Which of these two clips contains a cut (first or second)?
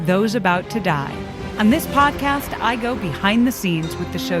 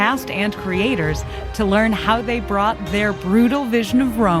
first